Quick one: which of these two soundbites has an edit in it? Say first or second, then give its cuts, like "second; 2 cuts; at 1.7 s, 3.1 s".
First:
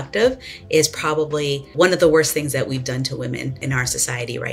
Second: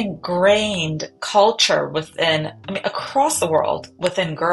first; 2 cuts; at 1.7 s, 3.6 s